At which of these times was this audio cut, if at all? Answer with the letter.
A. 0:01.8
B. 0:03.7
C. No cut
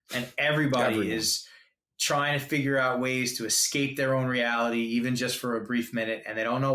A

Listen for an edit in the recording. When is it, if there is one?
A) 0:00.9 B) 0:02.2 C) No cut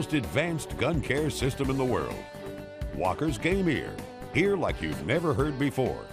B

